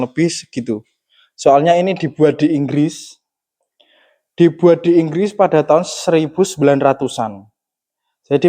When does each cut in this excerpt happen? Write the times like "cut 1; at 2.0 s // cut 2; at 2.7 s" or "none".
none